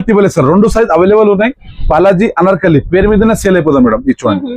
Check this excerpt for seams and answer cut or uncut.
uncut